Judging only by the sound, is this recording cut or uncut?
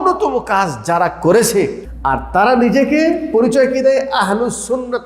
cut